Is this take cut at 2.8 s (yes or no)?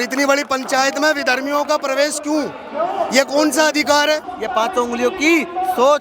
no